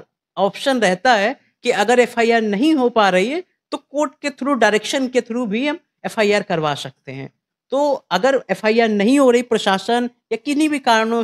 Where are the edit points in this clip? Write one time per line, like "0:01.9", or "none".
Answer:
none